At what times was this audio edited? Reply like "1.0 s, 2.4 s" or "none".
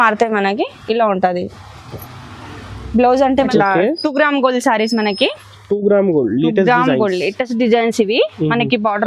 3.5 s